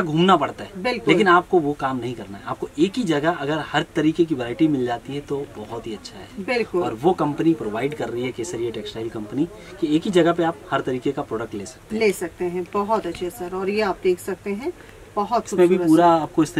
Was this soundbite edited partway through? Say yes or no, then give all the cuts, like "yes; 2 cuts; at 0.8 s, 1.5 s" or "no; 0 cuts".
no; 0 cuts